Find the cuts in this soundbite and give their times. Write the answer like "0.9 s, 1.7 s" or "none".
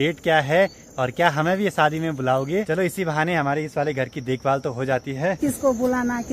2.7 s, 5.4 s